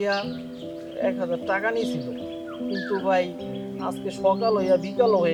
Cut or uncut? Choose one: uncut